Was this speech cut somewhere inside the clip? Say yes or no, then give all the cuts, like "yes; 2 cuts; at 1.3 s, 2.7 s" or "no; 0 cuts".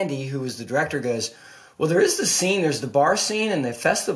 no; 0 cuts